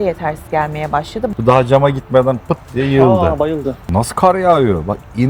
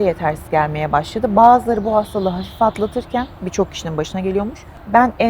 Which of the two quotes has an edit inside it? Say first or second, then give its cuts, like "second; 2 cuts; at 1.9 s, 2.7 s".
first; 2 cuts; at 1.3 s, 3.9 s